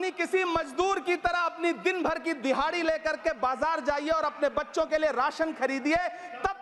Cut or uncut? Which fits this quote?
uncut